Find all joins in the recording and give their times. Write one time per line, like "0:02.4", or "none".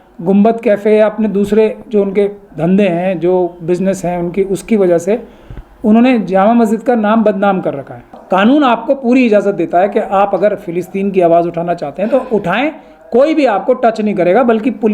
0:08.1

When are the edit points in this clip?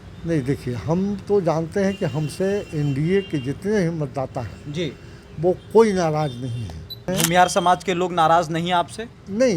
0:07.1

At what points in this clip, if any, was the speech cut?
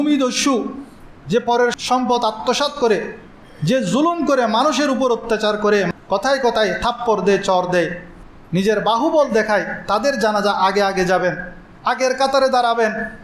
0:01.8
0:05.9

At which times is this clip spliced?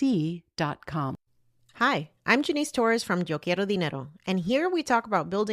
0:01.3

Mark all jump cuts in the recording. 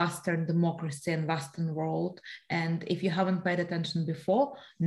none

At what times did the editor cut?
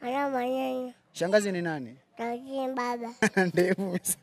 0:03.3

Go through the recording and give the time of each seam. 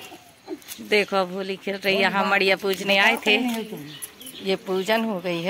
none

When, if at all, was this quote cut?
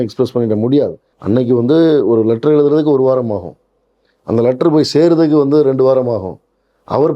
0:01.1

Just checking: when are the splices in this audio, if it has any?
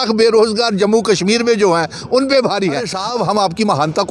0:03.0

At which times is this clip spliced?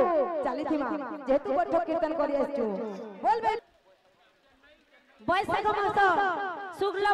0:03.6

